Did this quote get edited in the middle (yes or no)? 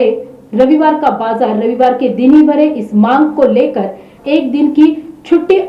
yes